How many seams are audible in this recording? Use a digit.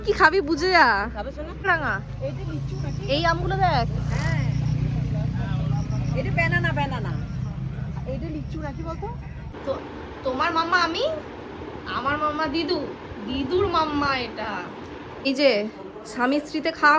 3